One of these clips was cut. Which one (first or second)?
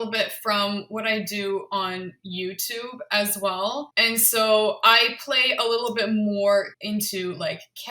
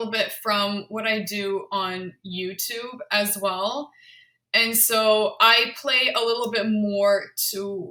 first